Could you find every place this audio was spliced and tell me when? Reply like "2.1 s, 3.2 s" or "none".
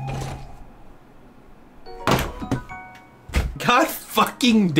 3.5 s